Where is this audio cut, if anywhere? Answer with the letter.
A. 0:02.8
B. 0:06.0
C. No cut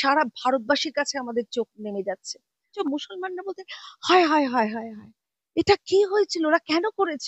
A